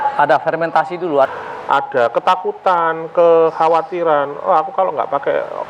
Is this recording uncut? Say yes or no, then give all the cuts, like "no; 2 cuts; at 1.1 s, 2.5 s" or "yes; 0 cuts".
no; 1 cut; at 1.3 s